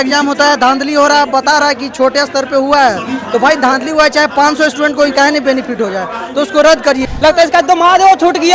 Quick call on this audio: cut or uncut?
cut